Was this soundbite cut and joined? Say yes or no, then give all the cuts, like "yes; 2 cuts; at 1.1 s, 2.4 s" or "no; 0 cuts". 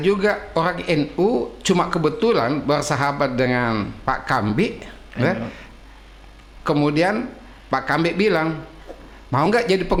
no; 0 cuts